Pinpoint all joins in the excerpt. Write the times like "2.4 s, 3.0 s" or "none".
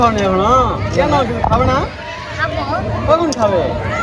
none